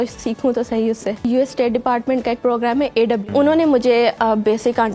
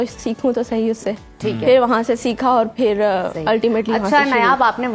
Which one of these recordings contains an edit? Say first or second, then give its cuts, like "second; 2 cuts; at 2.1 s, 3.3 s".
first; 2 cuts; at 1.2 s, 3.3 s